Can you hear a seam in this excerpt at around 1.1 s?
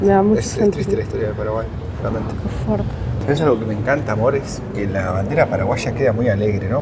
no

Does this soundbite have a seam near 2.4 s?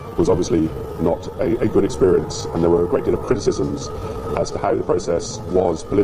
no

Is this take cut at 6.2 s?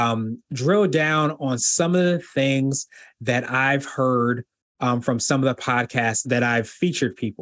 yes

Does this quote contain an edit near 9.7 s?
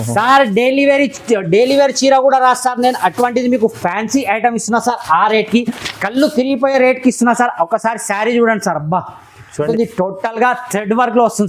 yes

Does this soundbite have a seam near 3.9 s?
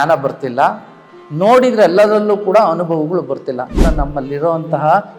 yes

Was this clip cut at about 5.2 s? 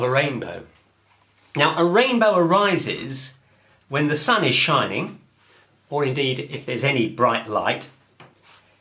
no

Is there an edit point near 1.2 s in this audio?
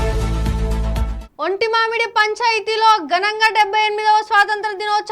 yes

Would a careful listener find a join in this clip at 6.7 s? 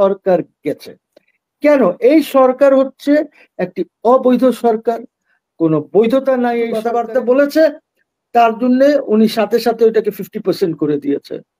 yes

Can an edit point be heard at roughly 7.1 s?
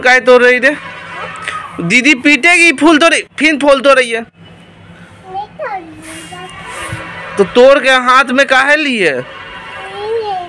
no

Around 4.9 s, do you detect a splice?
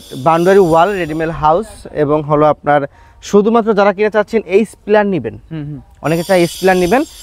no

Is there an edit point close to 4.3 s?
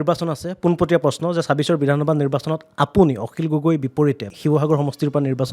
yes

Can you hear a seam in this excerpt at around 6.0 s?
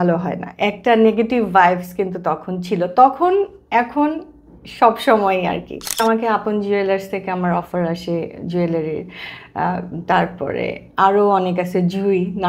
yes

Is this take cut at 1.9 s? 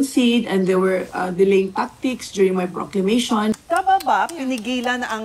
no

